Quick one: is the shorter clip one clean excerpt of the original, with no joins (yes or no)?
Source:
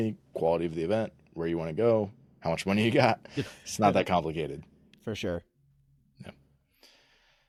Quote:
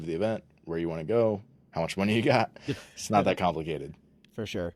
yes